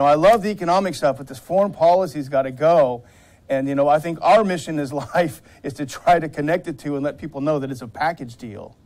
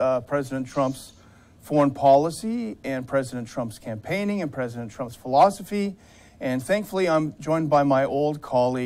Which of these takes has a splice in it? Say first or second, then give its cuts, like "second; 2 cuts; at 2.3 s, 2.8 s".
first; 1 cut; at 2.4 s